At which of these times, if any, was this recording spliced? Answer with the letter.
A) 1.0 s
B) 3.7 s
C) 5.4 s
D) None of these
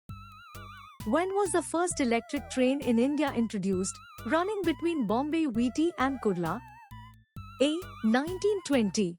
A